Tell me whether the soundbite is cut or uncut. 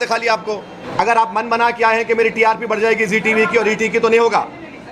cut